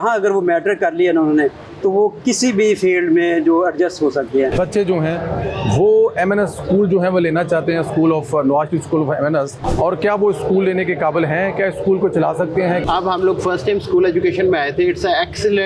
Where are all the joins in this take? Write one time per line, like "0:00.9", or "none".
0:04.5
0:09.5
0:12.8